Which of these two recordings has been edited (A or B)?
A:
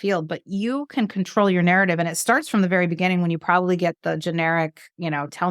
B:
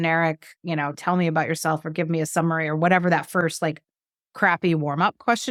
A